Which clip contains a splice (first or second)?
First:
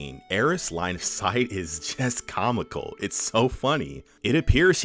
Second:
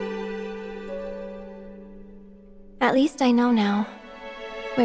second